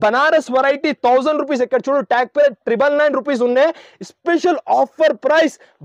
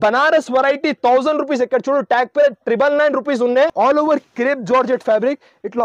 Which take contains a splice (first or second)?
second